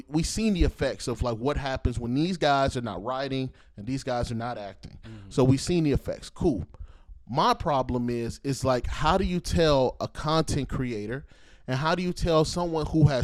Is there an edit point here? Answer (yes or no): no